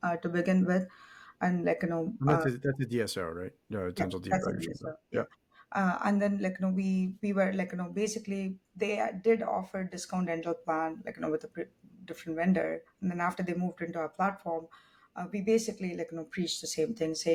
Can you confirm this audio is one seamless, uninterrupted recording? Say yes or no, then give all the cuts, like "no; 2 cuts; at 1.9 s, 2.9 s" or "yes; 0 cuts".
yes; 0 cuts